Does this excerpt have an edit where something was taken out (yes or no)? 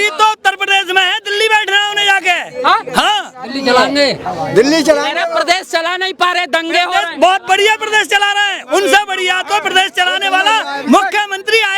no